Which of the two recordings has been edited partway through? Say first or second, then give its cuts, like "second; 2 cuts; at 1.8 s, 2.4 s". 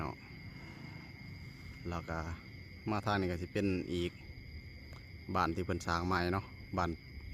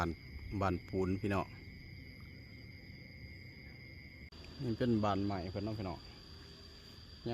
second; 1 cut; at 4.3 s